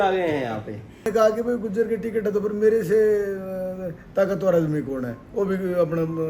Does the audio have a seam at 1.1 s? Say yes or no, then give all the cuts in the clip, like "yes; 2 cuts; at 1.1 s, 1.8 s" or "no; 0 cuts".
yes; 1 cut; at 1.1 s